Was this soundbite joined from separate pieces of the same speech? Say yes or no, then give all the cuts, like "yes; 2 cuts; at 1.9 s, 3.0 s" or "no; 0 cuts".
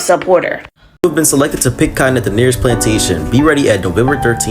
yes; 1 cut; at 1.0 s